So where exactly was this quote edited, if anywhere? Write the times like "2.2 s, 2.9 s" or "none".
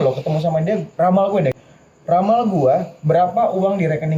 1.5 s